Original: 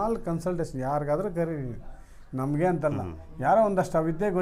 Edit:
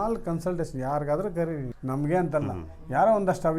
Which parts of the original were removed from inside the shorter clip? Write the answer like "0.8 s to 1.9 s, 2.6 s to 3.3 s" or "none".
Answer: 1.7 s to 2.2 s